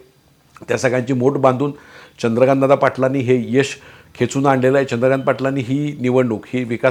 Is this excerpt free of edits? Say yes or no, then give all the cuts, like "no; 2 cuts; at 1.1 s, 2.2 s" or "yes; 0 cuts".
yes; 0 cuts